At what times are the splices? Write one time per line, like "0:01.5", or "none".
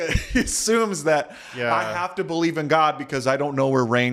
none